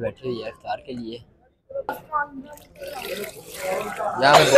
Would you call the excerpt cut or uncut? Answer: cut